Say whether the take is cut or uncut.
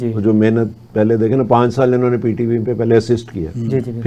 uncut